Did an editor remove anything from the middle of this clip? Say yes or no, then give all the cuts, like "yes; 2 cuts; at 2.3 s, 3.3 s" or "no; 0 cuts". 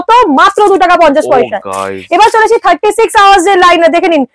no; 0 cuts